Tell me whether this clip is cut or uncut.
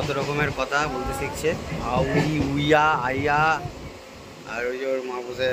uncut